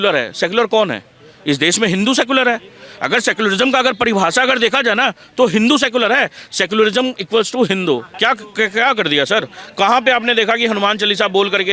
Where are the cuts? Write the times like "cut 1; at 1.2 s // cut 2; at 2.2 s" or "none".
cut 1; at 8.1 s